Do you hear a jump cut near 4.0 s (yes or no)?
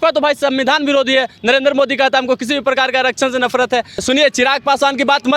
yes